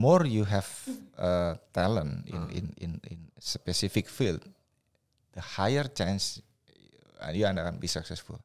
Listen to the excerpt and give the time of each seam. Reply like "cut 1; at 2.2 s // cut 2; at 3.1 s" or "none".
none